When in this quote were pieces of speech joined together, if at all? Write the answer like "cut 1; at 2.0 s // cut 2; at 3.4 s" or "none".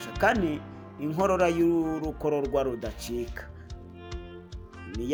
none